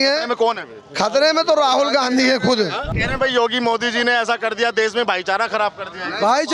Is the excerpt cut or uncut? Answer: cut